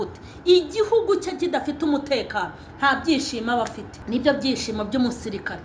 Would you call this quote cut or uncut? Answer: uncut